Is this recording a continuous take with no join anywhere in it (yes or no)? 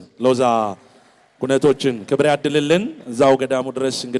yes